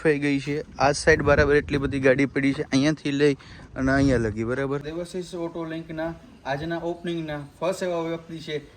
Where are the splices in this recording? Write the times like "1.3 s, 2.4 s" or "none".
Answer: 4.9 s